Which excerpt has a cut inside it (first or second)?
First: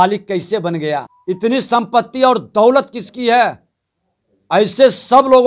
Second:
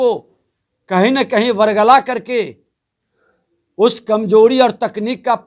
first